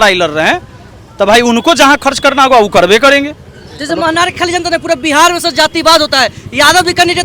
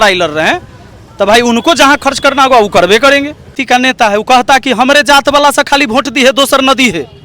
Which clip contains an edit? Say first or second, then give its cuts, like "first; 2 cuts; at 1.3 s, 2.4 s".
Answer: second; 1 cut; at 3.6 s